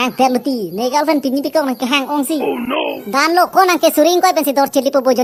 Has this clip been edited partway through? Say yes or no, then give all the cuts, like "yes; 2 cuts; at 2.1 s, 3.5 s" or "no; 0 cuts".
no; 0 cuts